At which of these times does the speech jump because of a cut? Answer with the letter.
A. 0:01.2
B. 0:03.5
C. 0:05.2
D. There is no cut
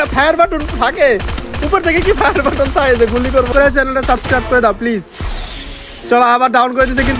B